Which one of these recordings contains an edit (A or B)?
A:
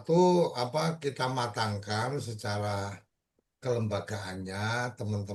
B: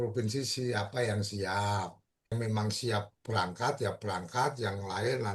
B